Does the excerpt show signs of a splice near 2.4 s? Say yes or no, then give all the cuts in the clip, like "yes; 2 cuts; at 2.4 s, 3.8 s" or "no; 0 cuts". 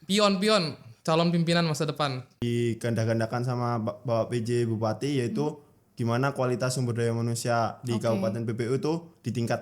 yes; 1 cut; at 2.4 s